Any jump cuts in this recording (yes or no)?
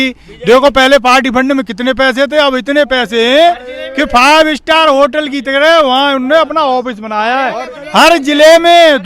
no